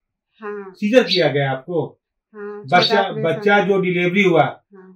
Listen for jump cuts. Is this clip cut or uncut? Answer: uncut